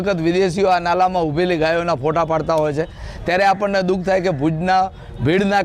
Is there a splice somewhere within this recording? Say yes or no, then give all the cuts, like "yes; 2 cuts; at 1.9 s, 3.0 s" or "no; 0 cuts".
no; 0 cuts